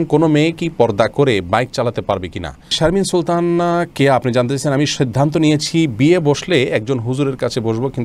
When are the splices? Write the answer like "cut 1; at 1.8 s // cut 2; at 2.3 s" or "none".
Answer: cut 1; at 2.7 s